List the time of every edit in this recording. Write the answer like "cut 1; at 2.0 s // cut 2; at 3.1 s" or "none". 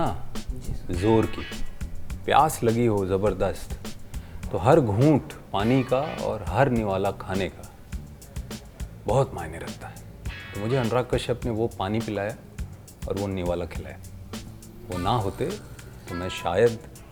none